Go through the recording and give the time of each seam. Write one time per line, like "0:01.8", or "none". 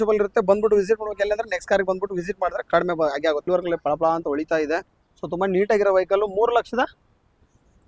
0:03.4